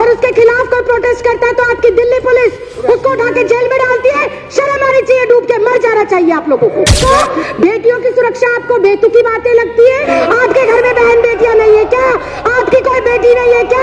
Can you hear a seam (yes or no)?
yes